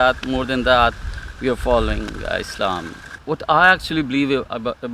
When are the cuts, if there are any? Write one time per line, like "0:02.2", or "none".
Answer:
0:03.1